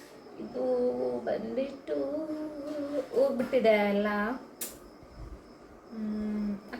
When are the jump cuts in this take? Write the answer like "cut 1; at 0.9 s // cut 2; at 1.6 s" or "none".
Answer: none